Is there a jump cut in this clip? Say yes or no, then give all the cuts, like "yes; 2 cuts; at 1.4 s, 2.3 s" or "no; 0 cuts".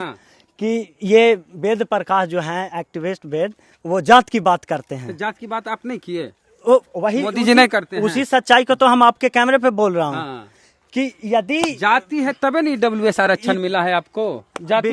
no; 0 cuts